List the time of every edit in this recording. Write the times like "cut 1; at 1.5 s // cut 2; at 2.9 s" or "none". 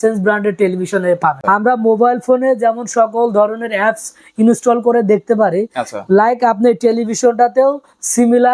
cut 1; at 1.4 s